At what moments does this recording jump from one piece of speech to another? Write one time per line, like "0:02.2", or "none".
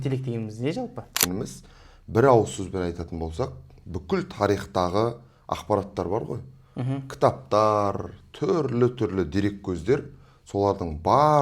0:01.3